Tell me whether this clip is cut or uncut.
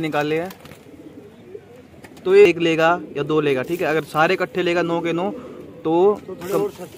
cut